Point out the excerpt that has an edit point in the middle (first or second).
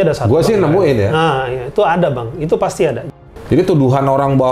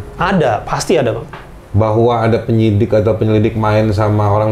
first